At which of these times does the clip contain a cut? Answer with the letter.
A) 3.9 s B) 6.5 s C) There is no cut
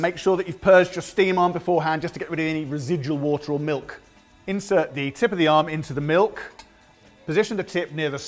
B